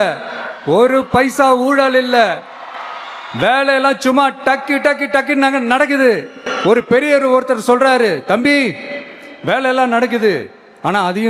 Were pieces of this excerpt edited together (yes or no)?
no